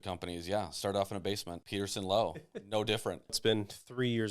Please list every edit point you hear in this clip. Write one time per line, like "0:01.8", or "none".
0:01.6
0:03.4